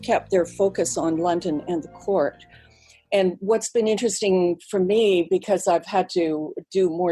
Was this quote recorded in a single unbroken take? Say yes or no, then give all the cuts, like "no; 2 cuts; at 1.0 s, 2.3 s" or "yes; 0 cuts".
yes; 0 cuts